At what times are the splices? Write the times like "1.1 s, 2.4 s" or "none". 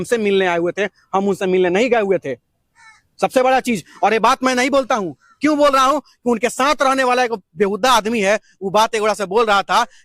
none